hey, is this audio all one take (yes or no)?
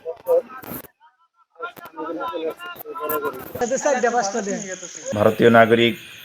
no